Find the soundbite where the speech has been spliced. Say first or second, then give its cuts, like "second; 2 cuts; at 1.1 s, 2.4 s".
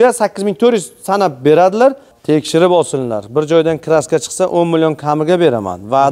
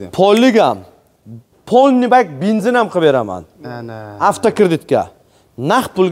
first; 1 cut; at 2.1 s